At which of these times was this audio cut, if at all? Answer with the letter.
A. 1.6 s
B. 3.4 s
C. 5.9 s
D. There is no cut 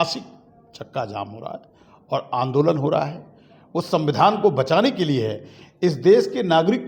D